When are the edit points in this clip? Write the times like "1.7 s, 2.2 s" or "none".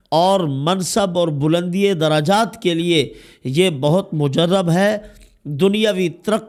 none